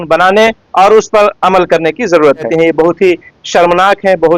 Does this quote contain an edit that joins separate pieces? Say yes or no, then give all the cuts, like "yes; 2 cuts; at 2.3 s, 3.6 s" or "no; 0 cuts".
yes; 1 cut; at 2.5 s